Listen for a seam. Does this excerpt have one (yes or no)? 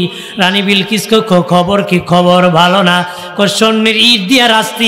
no